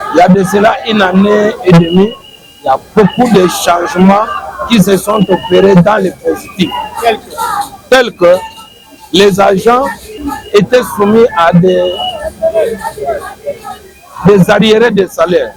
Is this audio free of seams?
yes; 0 cuts

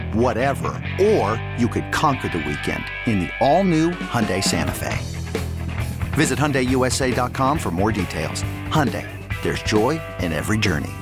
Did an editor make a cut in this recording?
no; 0 cuts

